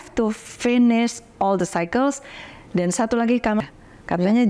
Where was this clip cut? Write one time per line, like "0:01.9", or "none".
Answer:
0:03.6